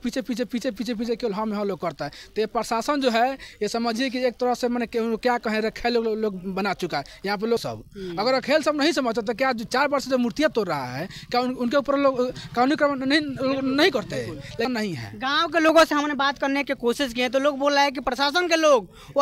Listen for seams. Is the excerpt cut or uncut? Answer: cut